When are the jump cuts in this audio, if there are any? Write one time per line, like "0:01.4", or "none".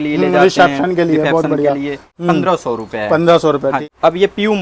0:02.0
0:03.8